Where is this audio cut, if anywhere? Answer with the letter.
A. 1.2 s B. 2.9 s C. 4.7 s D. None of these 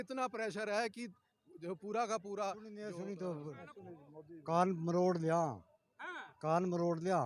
B